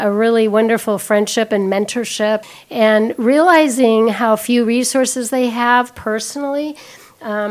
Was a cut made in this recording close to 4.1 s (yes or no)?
no